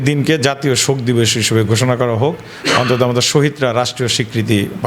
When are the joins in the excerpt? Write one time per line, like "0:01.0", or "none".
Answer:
none